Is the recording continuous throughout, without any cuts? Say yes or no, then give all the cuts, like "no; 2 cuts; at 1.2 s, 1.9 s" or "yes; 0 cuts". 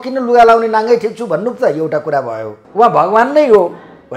no; 1 cut; at 2.6 s